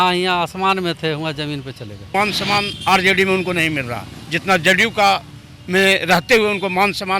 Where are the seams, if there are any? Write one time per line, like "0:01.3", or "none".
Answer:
0:02.1